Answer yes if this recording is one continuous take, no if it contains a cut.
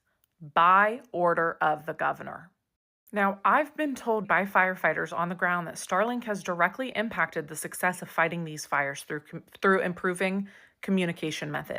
no